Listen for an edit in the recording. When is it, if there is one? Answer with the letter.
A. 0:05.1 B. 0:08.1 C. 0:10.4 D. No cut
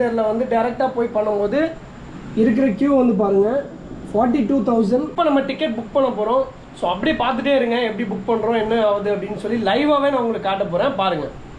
A